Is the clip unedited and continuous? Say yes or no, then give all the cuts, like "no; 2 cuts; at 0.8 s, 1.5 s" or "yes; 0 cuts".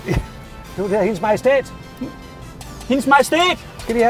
yes; 0 cuts